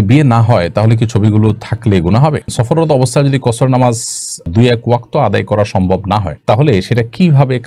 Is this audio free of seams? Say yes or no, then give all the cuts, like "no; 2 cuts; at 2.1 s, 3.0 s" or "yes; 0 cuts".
no; 1 cut; at 2.5 s